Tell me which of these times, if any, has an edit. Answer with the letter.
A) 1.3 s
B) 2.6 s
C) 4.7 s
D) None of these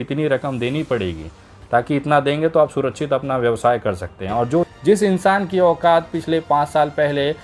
C